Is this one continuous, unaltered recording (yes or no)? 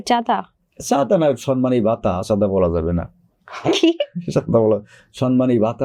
yes